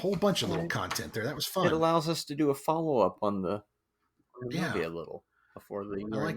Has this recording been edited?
yes; 1 cut; at 1.6 s

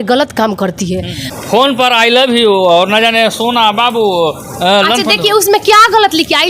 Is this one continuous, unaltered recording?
no; 1 cut; at 1.2 s

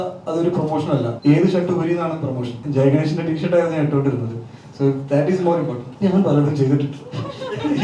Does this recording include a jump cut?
yes; 3 cuts; at 1.1 s, 2.5 s, 5.8 s

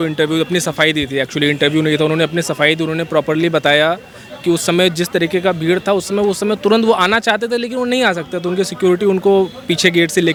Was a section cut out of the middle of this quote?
no; 0 cuts

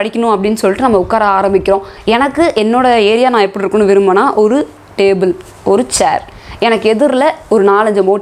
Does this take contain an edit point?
no; 0 cuts

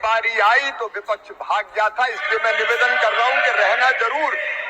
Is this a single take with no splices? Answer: yes; 0 cuts

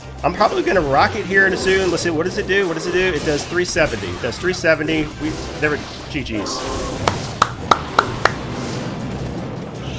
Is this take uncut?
yes; 0 cuts

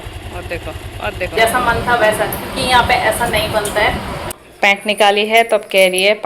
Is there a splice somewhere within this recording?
yes; 2 cuts; at 1.3 s, 4.3 s

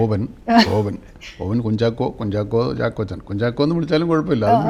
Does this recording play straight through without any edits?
yes; 0 cuts

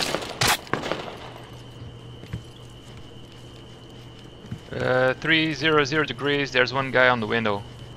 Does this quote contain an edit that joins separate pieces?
yes; 1 cut; at 2.6 s

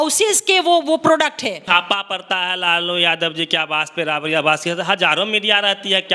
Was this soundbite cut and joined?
yes; 1 cut; at 1.6 s

